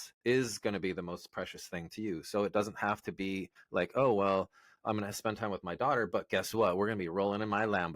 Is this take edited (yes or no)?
yes